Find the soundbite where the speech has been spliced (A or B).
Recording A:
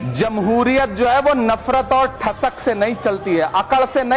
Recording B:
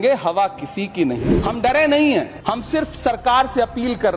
B